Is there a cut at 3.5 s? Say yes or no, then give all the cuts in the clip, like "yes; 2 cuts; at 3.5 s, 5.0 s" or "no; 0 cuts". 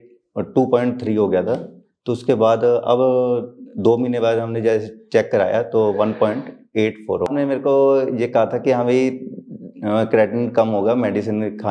no; 1 cut; at 7.3 s